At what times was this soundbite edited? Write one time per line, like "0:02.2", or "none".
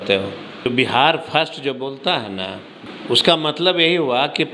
0:00.7
0:02.8